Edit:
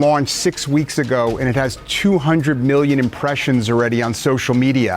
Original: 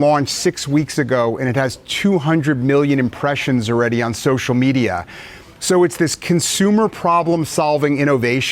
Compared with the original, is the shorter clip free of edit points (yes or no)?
yes